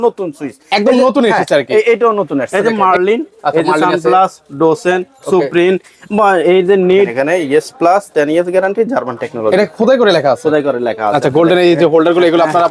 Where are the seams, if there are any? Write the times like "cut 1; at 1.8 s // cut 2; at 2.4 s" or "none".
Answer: cut 1; at 2.7 s // cut 2; at 7.2 s // cut 3; at 11.3 s